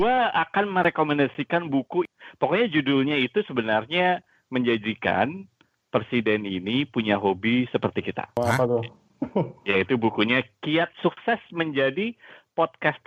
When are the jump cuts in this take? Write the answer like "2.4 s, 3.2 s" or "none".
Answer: none

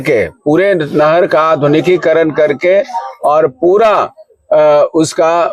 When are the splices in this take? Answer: none

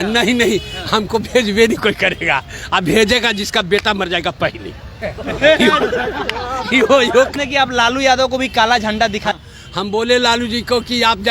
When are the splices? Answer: 7.3 s, 9.4 s

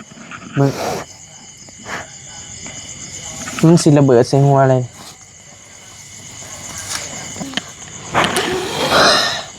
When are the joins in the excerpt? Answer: 7.4 s

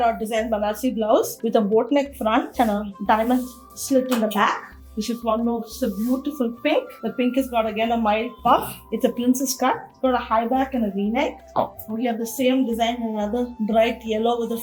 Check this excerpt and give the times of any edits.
none

